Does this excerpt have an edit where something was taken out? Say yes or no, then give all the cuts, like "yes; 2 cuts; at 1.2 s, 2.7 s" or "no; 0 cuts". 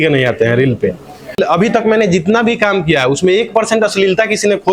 yes; 1 cut; at 1.4 s